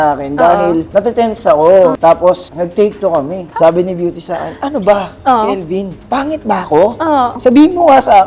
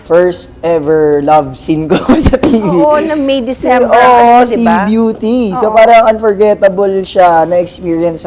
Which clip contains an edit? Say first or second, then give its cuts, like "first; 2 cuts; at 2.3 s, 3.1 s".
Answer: first; 3 cuts; at 0.9 s, 3.4 s, 7.3 s